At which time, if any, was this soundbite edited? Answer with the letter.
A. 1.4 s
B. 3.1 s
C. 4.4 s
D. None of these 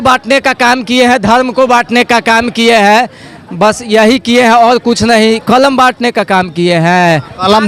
D